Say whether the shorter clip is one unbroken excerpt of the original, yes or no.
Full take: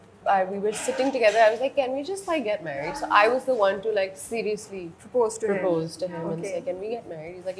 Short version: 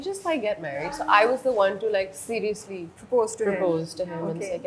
yes